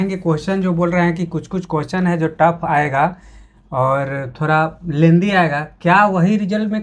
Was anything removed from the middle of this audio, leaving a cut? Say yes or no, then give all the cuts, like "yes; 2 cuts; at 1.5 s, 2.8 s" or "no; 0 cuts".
no; 0 cuts